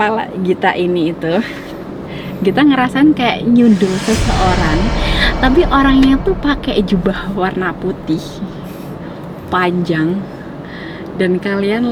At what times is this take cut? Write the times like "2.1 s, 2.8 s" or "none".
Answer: none